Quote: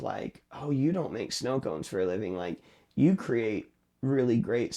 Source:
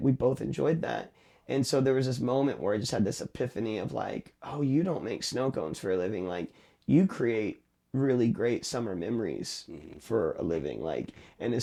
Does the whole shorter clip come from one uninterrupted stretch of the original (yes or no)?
yes